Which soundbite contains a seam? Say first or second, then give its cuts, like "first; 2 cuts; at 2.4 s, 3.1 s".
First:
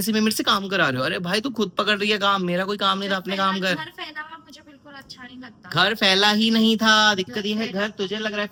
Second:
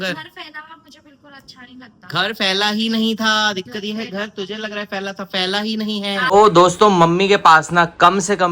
second; 1 cut; at 6.2 s